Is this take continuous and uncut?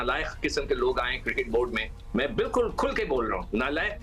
yes; 0 cuts

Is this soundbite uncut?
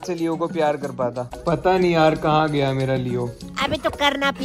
yes; 0 cuts

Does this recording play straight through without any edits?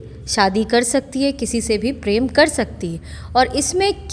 yes; 0 cuts

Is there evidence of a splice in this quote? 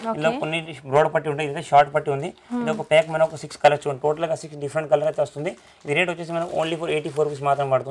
no; 0 cuts

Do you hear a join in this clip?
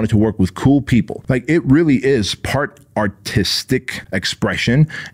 yes; 2 cuts; at 1.2 s, 4.0 s

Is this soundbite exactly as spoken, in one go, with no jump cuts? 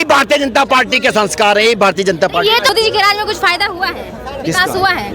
no; 1 cut; at 2.7 s

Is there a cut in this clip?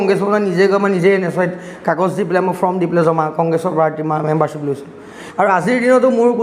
yes; 1 cut; at 5.2 s

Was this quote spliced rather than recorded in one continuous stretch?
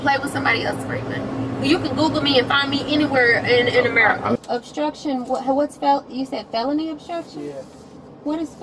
yes; 1 cut; at 4.4 s

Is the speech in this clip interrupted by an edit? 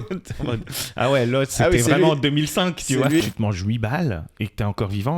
yes; 1 cut; at 3.2 s

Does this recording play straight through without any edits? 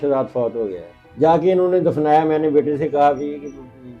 no; 1 cut; at 1.0 s

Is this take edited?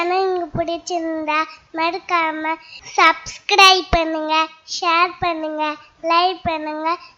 no; 0 cuts

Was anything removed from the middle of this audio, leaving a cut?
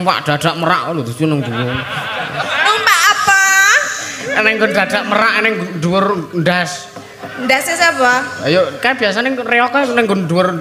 yes; 1 cut; at 2.5 s

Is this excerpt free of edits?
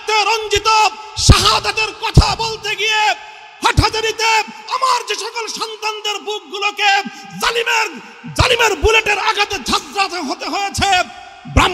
yes; 0 cuts

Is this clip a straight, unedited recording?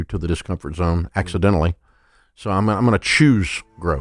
yes; 0 cuts

